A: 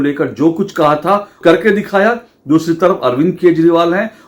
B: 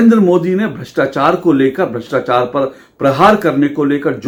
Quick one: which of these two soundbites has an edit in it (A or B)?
A